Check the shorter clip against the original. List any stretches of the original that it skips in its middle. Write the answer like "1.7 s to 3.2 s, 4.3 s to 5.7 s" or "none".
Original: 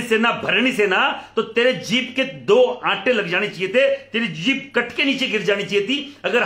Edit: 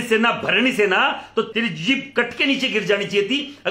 1.5 s to 4.1 s